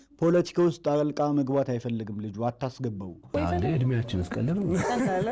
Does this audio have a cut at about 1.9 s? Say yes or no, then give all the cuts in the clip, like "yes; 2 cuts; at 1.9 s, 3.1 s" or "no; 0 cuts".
no; 1 cut; at 3.2 s